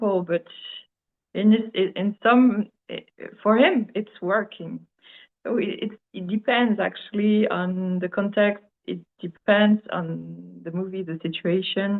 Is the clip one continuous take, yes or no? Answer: yes